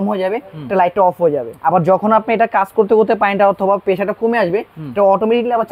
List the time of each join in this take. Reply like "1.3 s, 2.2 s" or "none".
1.5 s